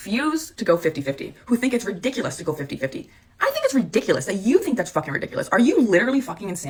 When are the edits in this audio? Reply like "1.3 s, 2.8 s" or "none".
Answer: none